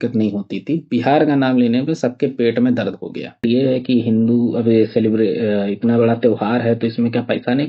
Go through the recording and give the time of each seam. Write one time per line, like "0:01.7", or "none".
0:03.4